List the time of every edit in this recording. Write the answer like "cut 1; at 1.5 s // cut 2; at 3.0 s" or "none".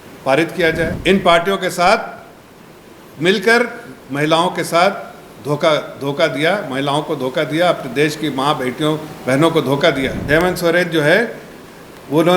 cut 1; at 0.9 s // cut 2; at 10.2 s